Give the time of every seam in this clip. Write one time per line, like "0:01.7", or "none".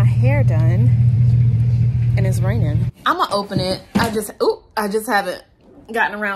0:02.9